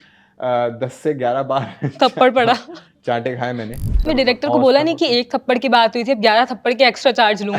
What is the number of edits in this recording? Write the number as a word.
one